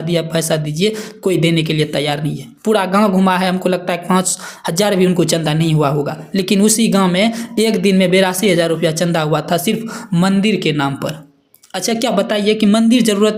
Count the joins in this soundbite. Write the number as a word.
zero